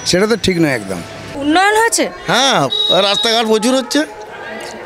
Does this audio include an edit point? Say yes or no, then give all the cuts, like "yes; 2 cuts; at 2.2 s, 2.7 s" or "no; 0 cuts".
yes; 1 cut; at 1.3 s